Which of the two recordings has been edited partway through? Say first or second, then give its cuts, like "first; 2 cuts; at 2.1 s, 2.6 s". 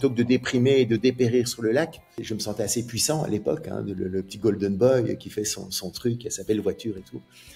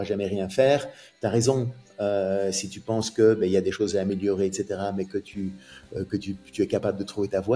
first; 1 cut; at 2.3 s